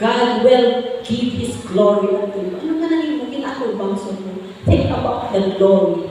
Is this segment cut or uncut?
uncut